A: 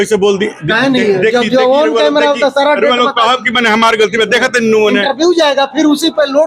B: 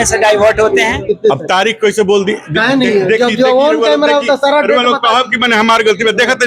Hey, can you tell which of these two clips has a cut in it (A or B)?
B